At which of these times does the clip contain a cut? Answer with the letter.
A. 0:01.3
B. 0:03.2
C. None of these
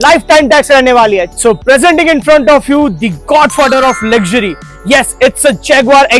A